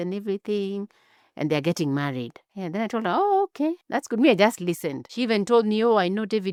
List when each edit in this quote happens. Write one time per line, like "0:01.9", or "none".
none